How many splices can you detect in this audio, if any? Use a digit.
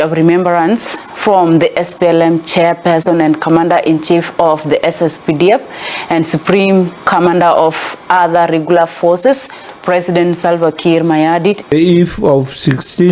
1